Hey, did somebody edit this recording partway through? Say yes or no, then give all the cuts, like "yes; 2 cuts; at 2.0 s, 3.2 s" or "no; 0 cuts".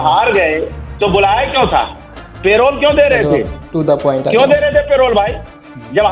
no; 0 cuts